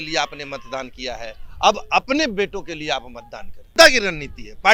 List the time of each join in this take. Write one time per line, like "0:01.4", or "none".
0:03.7